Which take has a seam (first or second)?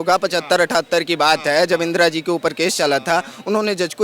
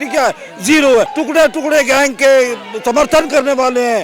second